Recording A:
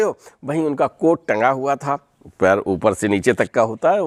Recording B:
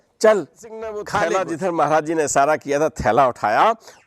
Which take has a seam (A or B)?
B